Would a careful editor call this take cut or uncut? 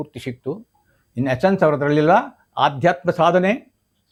uncut